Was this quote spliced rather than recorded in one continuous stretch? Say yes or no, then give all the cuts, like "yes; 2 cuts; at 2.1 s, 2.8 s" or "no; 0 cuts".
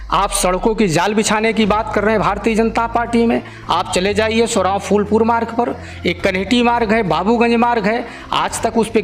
no; 0 cuts